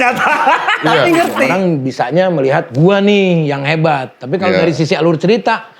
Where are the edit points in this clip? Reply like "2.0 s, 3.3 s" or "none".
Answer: 1.4 s